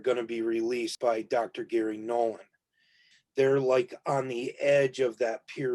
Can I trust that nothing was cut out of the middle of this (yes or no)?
no